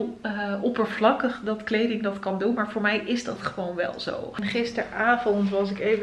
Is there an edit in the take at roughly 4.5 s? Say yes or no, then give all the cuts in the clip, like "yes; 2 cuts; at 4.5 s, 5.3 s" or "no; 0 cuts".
yes; 1 cut; at 4.5 s